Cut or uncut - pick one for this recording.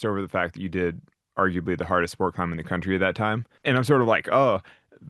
cut